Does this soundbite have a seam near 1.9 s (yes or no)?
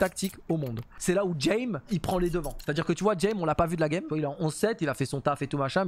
yes